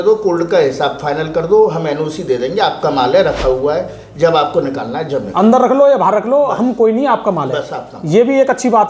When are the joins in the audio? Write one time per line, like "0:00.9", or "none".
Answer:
none